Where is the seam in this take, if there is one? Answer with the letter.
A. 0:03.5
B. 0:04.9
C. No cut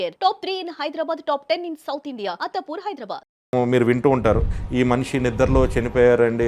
A